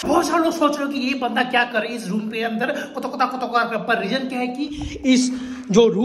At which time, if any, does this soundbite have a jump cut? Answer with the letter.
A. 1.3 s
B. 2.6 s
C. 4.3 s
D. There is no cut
D